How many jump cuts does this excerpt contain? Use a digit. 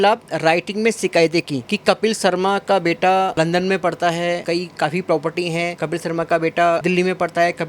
5